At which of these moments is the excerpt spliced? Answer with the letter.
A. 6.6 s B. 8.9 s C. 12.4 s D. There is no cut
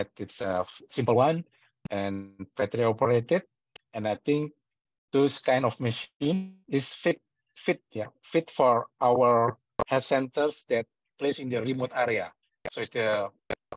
A